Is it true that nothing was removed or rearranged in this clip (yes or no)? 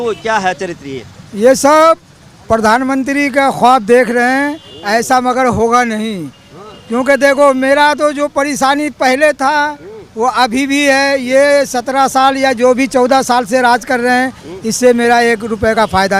yes